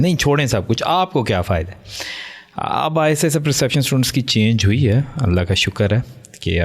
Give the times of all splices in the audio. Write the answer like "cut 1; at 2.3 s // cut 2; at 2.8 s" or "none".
none